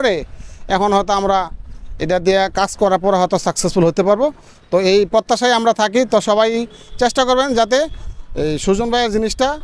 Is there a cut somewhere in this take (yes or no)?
no